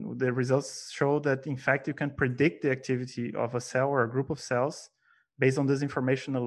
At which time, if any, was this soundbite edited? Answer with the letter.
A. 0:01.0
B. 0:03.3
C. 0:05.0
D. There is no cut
D